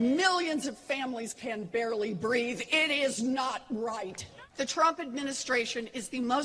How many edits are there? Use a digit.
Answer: 1